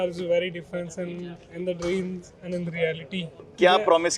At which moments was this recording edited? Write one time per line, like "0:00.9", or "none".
none